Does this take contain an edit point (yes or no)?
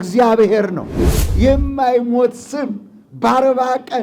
yes